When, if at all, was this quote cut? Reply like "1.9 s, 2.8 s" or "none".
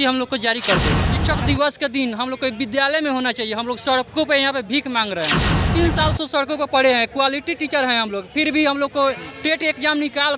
1.1 s, 5.6 s